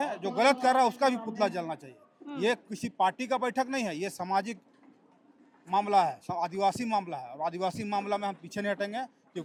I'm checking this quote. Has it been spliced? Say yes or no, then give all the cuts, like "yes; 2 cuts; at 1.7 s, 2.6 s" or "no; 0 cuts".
no; 0 cuts